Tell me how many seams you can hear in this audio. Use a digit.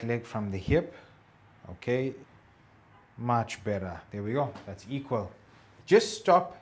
2